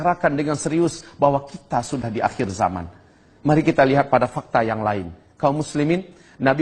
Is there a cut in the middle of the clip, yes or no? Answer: no